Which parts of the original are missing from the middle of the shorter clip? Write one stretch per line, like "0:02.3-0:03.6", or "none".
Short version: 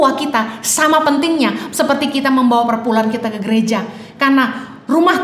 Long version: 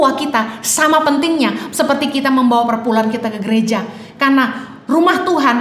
none

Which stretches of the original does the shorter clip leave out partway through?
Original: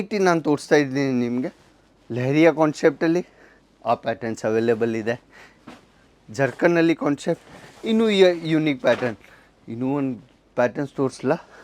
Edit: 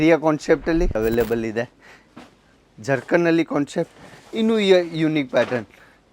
0:03.3-0:04.4

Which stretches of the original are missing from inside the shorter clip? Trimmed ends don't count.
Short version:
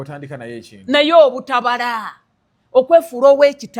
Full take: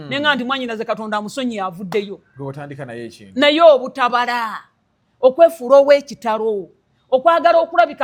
none

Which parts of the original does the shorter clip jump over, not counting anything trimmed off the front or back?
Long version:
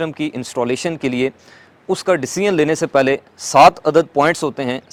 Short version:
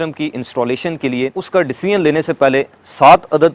0:01.4-0:01.9

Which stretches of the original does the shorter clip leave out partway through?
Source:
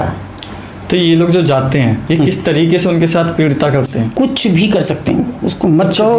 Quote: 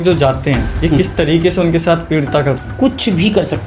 0:03.9-0:04.0

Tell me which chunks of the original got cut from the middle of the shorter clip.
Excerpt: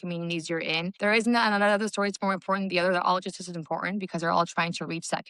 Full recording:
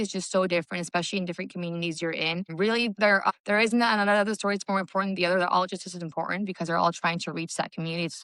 0:02.5-0:03.4

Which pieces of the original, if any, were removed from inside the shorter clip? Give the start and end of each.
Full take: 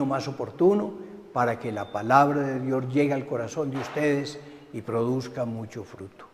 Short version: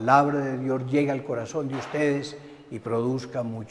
none

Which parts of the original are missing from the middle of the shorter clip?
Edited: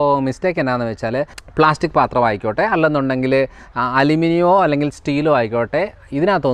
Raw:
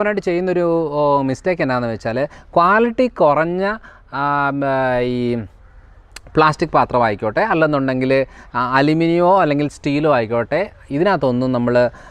0:02.4-0:06.1

